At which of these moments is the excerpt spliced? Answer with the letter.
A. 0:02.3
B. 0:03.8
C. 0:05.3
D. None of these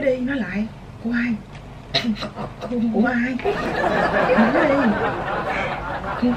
B